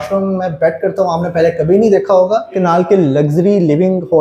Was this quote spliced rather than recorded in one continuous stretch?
yes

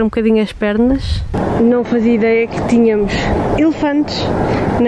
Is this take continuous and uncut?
no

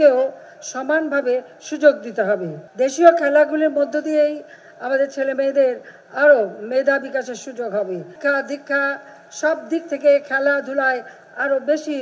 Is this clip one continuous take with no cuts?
no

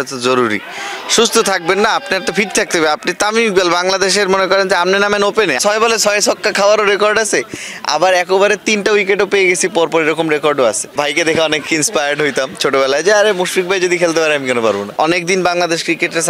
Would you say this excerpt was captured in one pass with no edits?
no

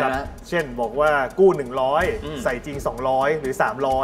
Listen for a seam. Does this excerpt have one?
no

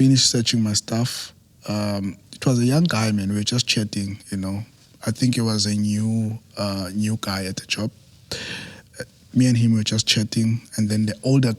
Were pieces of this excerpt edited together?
no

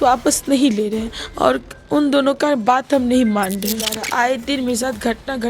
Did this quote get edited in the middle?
yes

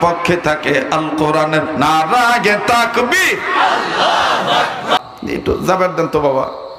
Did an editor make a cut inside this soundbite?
yes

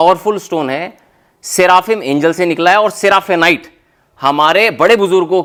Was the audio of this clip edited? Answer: no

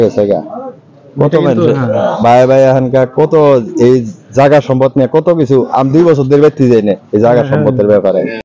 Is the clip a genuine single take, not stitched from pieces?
yes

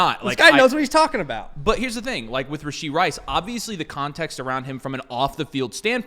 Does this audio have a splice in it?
no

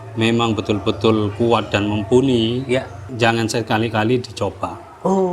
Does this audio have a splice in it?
yes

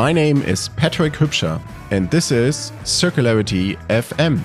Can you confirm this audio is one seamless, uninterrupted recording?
yes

